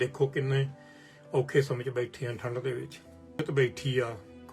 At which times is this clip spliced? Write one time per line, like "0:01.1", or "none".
0:03.4